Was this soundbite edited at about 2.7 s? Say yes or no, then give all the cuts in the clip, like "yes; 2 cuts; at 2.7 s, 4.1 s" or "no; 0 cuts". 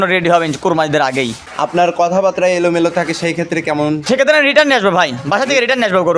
no; 2 cuts; at 1.4 s, 4.0 s